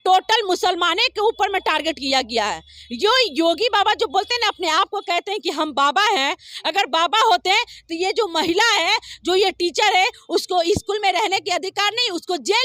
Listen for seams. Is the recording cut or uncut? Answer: uncut